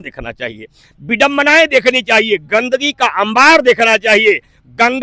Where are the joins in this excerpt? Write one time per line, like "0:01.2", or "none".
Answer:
none